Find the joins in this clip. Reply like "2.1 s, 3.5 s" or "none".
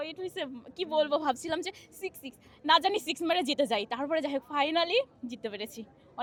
none